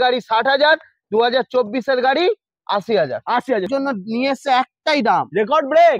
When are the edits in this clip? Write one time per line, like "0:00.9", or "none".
0:03.7